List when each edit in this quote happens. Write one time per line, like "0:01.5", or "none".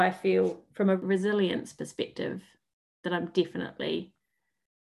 0:01.0